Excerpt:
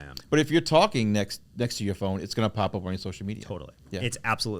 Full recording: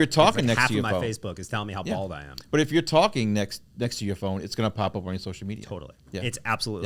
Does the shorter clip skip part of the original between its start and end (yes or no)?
no